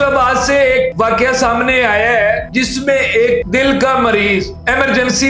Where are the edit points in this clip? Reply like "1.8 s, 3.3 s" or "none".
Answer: 0.9 s, 2.5 s, 3.4 s